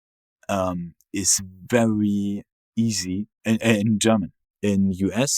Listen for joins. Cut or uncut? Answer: cut